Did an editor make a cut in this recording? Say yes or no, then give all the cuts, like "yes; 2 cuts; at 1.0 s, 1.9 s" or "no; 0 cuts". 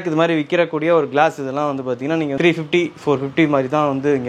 yes; 1 cut; at 2.4 s